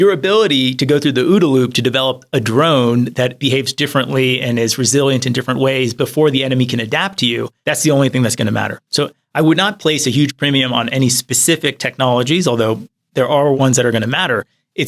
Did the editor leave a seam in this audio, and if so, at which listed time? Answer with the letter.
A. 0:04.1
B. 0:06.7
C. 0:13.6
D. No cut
C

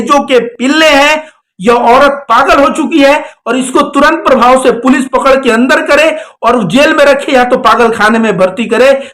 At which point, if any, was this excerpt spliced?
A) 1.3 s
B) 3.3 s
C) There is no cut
A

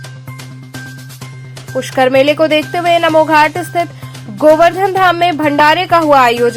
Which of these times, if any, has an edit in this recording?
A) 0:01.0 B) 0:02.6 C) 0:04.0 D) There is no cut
A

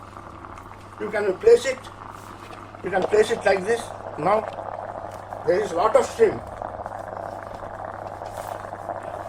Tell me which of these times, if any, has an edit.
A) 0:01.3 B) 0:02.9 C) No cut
C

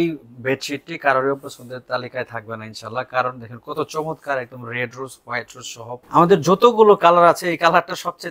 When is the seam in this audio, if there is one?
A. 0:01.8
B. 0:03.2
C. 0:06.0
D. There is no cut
C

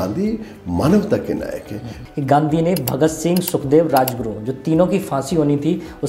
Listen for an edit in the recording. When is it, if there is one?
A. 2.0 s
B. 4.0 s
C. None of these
A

